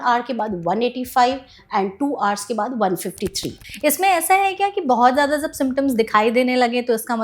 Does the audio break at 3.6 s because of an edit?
yes; 1 cut; at 3.6 s

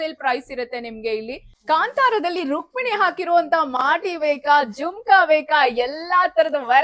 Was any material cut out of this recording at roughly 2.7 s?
no; 1 cut; at 1.5 s

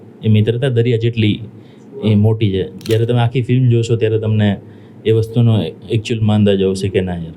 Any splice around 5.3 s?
no; 0 cuts

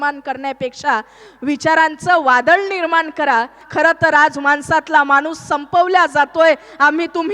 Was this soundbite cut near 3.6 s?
yes; 1 cut; at 3.6 s

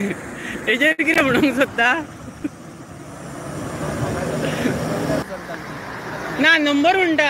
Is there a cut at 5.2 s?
yes; 1 cut; at 5.2 s

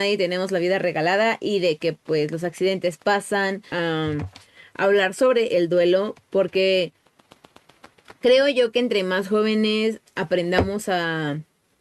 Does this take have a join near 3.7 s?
yes; 1 cut; at 3.7 s

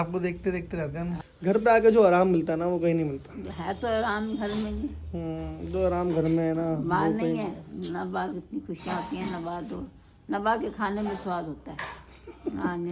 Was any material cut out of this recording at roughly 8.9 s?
no; 1 cut; at 1.3 s

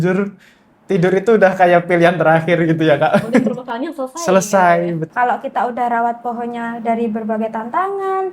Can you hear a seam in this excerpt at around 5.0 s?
yes; 2 cuts; at 3.6 s, 5.0 s

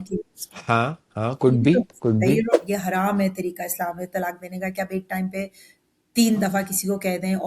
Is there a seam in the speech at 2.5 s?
yes; 1 cut; at 2.5 s

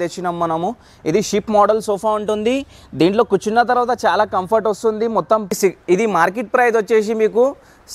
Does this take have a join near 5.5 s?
yes; 1 cut; at 5.5 s

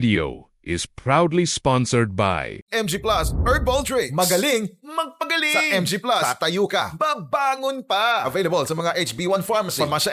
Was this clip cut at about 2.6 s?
yes; 1 cut; at 2.6 s

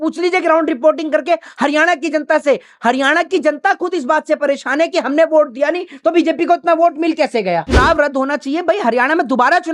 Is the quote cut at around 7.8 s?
yes; 1 cut; at 7.8 s

